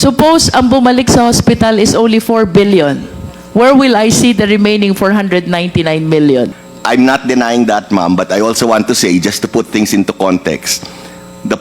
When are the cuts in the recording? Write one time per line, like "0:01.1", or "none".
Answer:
0:06.7